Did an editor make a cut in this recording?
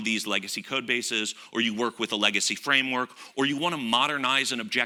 no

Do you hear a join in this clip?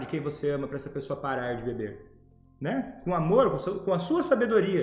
no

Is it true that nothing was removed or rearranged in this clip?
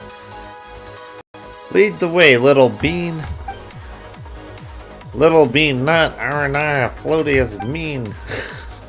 no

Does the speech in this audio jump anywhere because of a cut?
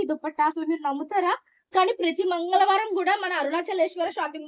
no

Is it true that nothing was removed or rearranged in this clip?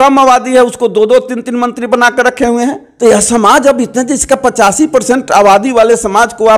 no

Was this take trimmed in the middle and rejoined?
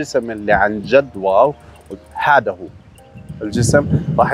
no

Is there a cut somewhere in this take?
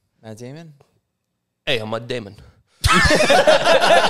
no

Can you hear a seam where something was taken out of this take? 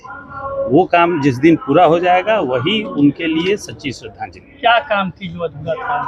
no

